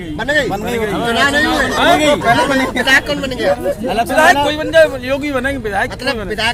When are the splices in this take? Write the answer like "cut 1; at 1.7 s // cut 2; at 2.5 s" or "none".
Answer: none